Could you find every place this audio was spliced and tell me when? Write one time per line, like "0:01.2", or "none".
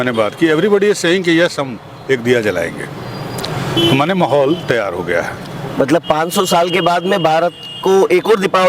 none